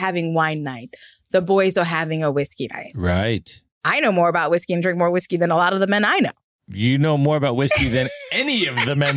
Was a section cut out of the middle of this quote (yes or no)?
no